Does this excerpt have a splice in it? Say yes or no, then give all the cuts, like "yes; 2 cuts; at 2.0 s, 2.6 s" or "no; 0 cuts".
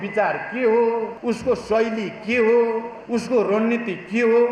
yes; 2 cuts; at 1.1 s, 2.9 s